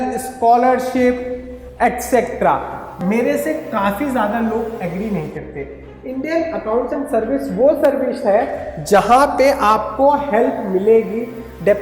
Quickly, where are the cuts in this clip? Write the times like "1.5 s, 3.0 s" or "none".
2.9 s